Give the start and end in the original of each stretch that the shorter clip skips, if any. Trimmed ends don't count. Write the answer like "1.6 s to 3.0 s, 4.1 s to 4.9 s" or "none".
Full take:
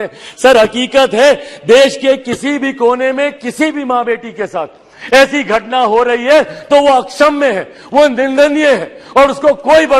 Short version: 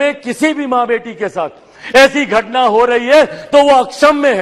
none